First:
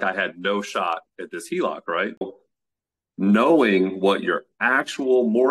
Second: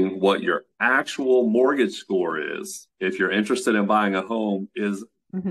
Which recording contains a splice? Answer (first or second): first